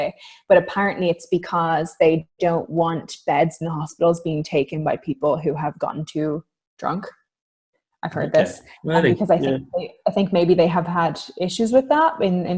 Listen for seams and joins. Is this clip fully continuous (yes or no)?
yes